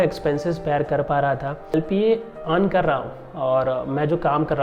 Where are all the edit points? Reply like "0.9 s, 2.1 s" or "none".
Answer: 1.7 s